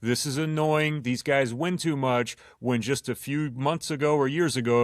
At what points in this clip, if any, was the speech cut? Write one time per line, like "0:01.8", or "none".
none

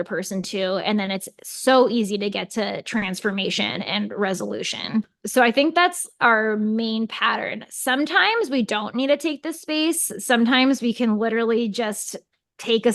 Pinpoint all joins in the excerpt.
none

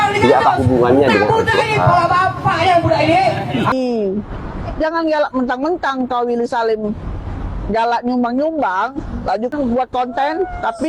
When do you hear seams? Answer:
0:03.7
0:09.5

